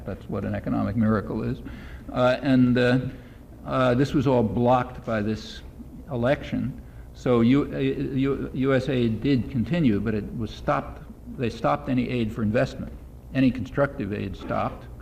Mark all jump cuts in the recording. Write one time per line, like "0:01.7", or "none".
0:10.1